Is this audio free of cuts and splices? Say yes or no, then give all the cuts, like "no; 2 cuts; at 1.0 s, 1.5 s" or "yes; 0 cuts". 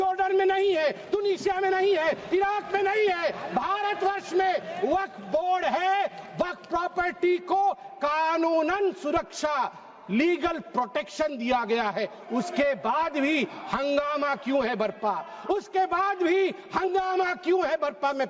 yes; 0 cuts